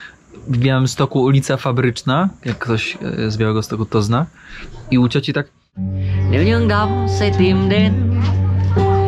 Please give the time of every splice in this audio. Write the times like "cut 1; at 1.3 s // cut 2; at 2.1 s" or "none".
cut 1; at 6.0 s

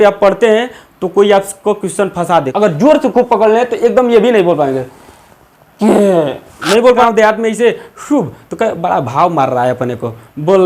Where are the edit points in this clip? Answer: cut 1; at 2.5 s // cut 2; at 7.0 s

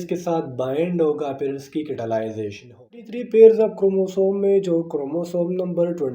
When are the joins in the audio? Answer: cut 1; at 3.1 s

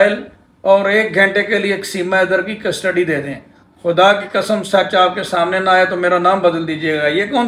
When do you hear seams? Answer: none

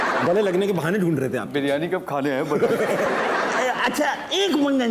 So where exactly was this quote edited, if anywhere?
cut 1; at 3.1 s

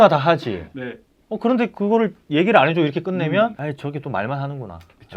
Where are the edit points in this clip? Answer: cut 1; at 3.6 s

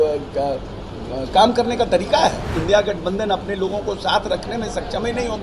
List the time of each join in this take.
cut 1; at 2.5 s

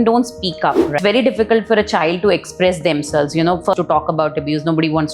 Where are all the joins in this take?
cut 1; at 0.9 s // cut 2; at 3.7 s

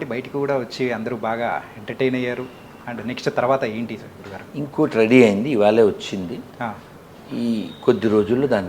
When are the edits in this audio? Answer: none

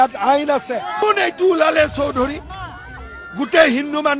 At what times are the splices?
cut 1; at 1.0 s

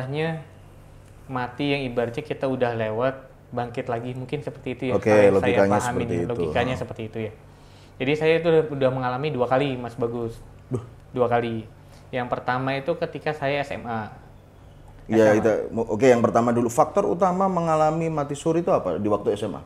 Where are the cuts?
none

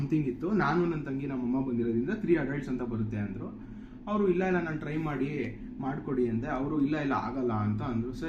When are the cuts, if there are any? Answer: none

